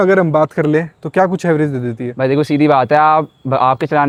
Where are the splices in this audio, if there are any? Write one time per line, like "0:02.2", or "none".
none